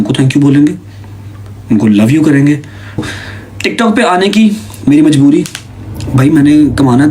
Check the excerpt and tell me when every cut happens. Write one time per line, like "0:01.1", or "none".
0:03.0